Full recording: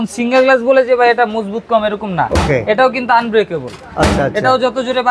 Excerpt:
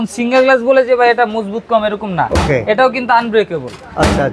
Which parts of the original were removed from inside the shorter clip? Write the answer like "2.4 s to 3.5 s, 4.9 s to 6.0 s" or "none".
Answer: none